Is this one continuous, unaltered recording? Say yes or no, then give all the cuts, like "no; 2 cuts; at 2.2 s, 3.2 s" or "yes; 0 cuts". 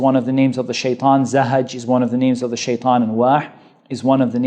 yes; 0 cuts